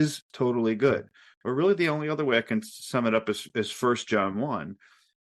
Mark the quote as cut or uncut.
uncut